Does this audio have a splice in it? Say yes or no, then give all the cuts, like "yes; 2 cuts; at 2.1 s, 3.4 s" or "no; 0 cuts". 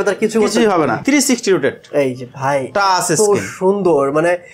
yes; 1 cut; at 1.0 s